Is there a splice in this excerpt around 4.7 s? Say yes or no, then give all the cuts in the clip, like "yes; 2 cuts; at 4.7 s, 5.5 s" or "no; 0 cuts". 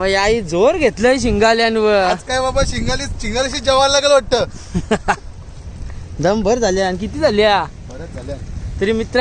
no; 0 cuts